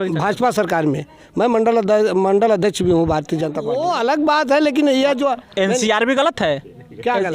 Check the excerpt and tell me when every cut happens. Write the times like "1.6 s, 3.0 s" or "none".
3.6 s